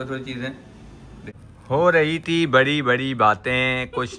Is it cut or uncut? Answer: cut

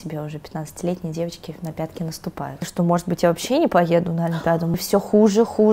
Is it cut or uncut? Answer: cut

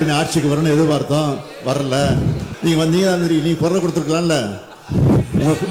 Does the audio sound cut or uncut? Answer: cut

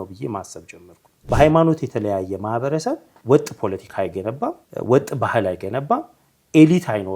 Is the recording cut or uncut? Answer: cut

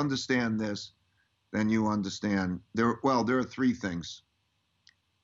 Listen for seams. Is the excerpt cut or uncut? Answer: uncut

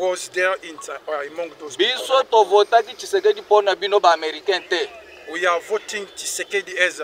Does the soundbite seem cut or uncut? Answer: uncut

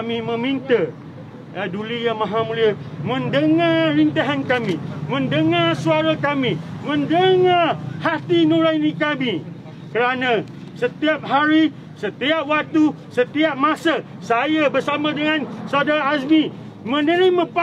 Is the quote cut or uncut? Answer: uncut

